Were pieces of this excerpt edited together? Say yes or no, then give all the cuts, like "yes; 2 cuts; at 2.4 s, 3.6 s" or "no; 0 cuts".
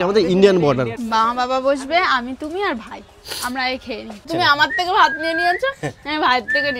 yes; 2 cuts; at 0.9 s, 4.3 s